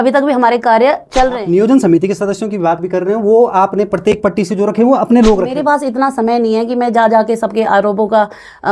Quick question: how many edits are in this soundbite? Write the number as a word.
two